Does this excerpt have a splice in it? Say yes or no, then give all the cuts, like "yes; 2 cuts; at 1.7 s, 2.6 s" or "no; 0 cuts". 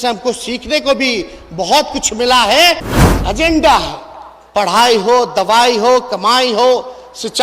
yes; 1 cut; at 3.0 s